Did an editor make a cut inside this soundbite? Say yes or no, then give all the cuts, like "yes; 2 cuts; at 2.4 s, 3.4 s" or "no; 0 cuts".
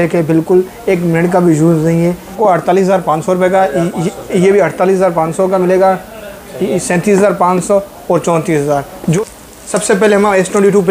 yes; 2 cuts; at 2.3 s, 9.2 s